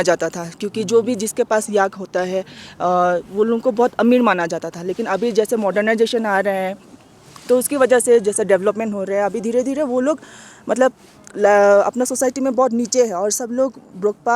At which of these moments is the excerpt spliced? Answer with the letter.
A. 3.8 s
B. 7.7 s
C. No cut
C